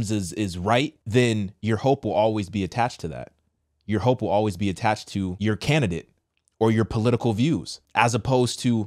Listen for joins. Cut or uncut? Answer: cut